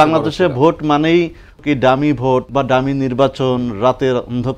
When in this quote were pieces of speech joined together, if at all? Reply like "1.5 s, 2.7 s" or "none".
1.6 s, 2.5 s